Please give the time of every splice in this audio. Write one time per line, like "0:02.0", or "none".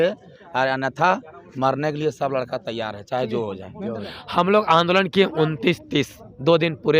0:04.0